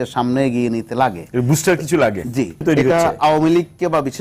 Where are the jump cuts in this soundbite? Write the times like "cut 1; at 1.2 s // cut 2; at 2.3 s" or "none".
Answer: cut 1; at 2.6 s